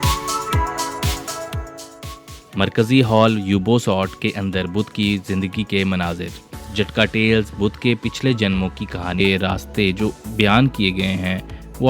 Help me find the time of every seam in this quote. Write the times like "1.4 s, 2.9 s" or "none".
9.2 s